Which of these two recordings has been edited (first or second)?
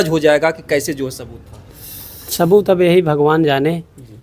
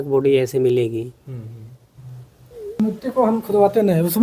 second